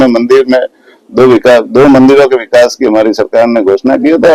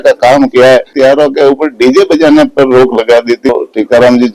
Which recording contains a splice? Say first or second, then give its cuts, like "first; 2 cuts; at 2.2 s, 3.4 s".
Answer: second; 2 cuts; at 0.9 s, 3.5 s